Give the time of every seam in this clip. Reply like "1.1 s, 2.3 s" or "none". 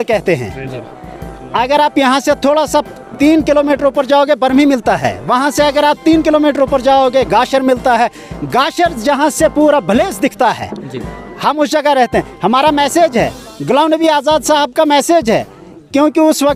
none